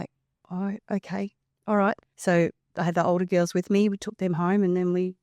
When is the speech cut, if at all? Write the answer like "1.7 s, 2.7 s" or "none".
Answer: 2.1 s